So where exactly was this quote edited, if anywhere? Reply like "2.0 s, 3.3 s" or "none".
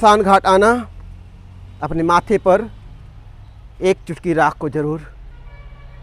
none